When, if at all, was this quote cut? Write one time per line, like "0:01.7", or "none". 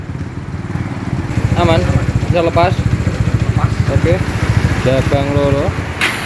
0:01.3